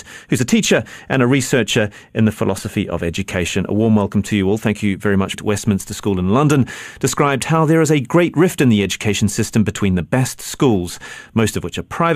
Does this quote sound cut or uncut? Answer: uncut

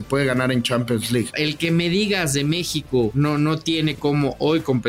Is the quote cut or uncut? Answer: cut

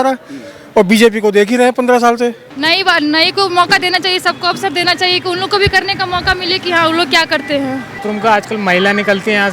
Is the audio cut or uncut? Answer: cut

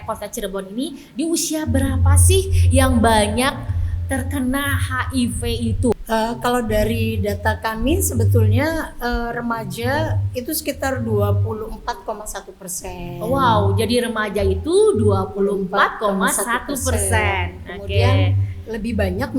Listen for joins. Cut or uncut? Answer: cut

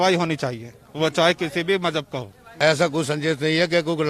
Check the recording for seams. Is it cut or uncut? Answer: cut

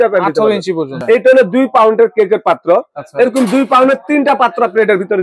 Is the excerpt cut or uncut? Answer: cut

